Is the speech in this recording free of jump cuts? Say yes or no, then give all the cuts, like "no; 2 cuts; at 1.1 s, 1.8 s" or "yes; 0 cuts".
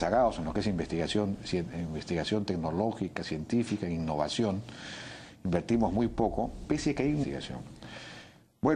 yes; 0 cuts